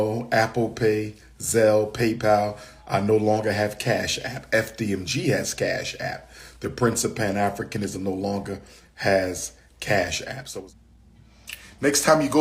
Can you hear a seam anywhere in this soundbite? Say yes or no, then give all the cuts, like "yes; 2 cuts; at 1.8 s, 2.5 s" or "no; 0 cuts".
yes; 1 cut; at 10.4 s